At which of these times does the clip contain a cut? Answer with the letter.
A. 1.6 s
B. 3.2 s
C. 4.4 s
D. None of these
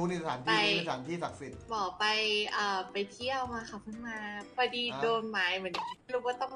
A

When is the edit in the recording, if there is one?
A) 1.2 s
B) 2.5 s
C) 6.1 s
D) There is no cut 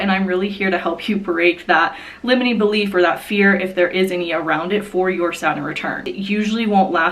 C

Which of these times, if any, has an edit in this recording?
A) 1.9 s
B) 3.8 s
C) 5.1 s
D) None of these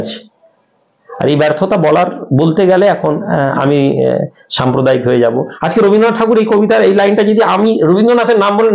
D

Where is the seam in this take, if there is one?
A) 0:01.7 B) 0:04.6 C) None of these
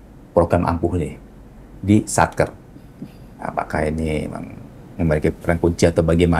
C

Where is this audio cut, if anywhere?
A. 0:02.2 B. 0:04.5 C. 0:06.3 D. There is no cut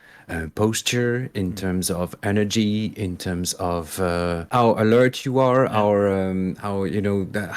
B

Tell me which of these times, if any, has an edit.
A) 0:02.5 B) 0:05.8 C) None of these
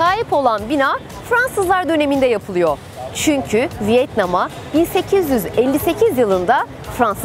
C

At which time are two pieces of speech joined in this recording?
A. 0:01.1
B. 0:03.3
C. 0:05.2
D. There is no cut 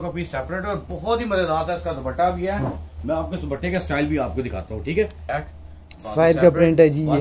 C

